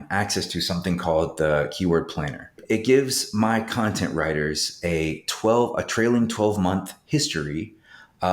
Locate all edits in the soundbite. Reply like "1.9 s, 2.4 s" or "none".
2.5 s